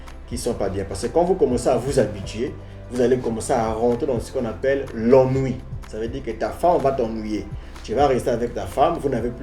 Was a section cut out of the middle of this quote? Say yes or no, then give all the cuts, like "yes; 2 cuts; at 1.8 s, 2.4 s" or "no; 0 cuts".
no; 0 cuts